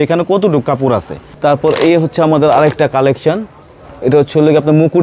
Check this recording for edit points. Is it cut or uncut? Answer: cut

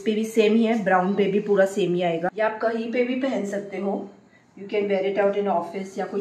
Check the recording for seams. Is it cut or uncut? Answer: cut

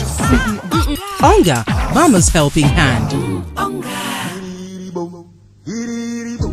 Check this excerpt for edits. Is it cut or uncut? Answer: cut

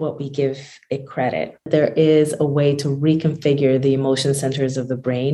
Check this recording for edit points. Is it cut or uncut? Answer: cut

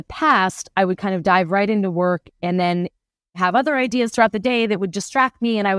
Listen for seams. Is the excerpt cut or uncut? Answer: cut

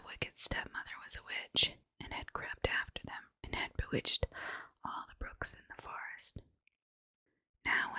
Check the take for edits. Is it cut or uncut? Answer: cut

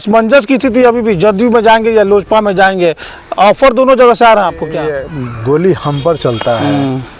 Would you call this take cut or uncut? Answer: cut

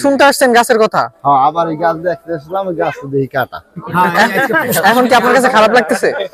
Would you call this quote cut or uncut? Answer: uncut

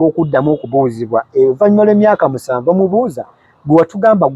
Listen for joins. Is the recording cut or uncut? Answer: uncut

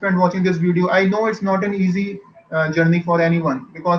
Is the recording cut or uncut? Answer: uncut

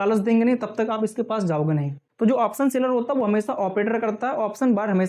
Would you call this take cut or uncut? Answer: uncut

